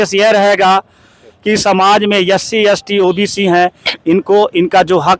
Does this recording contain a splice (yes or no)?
no